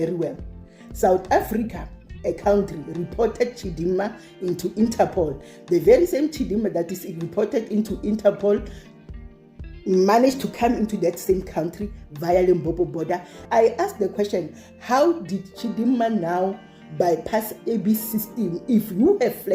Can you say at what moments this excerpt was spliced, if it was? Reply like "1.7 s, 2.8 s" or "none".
13.3 s